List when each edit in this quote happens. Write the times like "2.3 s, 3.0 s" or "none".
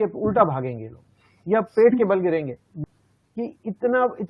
2.7 s